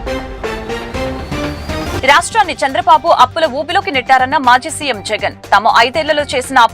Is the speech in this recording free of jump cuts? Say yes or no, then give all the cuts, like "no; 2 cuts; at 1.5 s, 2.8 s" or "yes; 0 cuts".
no; 1 cut; at 1.8 s